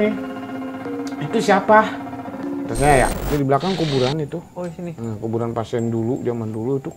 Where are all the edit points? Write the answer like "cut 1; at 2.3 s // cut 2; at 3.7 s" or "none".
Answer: cut 1; at 3.2 s